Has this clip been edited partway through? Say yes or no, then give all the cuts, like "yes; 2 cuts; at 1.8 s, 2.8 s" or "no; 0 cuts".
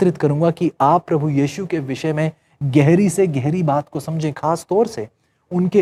no; 0 cuts